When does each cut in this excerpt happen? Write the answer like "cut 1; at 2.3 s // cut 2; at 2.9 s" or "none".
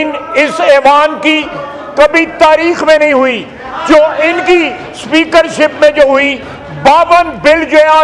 none

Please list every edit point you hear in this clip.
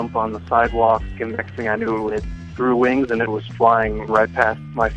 cut 1; at 1.1 s // cut 2; at 4.1 s

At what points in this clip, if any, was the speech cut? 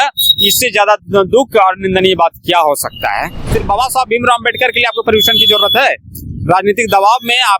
cut 1; at 3.5 s

